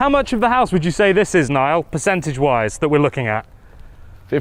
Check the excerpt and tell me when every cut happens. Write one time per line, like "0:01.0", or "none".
none